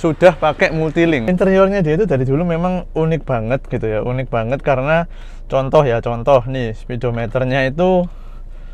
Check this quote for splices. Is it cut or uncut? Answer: cut